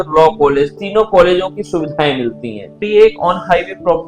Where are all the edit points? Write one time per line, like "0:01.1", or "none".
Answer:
0:02.7